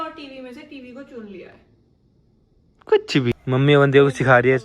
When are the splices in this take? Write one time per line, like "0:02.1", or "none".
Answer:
0:03.3

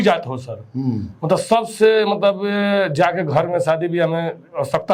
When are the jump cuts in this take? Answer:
none

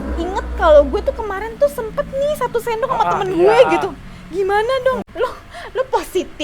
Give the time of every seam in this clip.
0:05.1

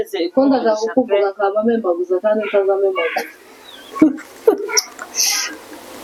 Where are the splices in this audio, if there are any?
none

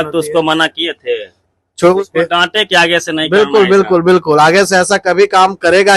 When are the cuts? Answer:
0:02.0

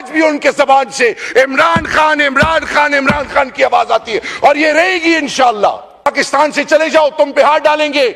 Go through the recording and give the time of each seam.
0:06.1

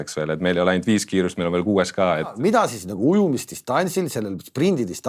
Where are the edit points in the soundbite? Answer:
0:02.3

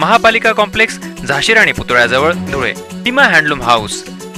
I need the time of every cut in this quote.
0:02.9

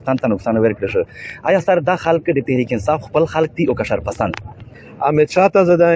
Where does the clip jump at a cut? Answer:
0:04.8

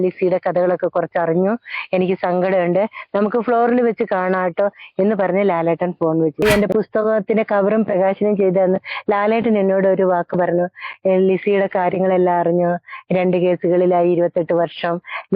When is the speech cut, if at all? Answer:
0:06.4

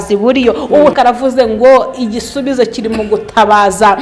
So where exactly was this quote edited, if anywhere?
0:00.9

